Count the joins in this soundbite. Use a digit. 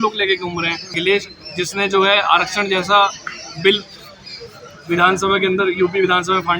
1